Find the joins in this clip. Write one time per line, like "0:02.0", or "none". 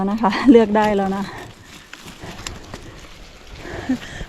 none